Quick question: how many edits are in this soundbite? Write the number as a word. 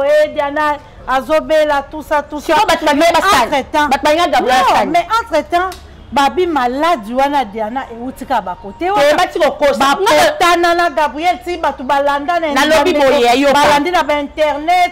zero